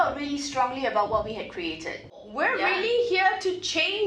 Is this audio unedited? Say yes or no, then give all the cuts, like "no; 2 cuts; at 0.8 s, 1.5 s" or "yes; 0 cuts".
no; 1 cut; at 2.2 s